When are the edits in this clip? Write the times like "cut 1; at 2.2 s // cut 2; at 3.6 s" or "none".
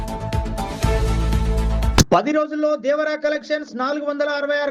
cut 1; at 1.5 s